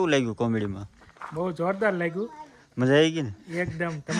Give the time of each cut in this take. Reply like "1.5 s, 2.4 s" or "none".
none